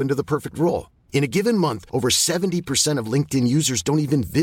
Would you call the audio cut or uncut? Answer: uncut